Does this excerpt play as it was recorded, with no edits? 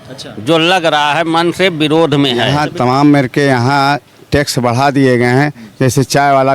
no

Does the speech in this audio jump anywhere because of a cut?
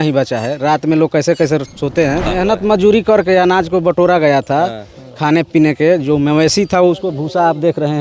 yes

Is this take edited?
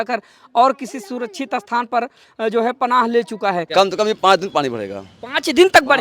yes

